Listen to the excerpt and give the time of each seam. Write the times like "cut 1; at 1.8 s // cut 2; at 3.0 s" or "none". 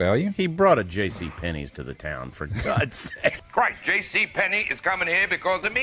cut 1; at 3.4 s